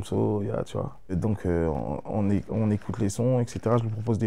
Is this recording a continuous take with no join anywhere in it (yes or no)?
yes